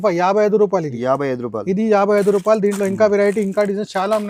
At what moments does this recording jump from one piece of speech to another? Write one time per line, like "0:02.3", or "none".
none